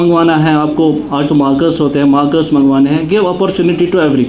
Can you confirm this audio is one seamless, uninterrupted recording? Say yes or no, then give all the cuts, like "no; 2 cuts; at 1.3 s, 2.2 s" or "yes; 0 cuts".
yes; 0 cuts